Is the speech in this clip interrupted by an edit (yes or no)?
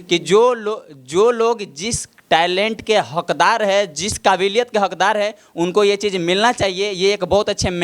yes